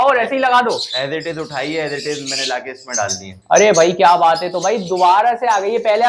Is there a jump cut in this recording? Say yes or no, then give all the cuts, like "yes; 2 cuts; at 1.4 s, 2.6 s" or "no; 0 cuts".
no; 0 cuts